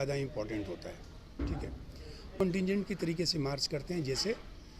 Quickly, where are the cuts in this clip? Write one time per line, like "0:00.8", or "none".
0:02.4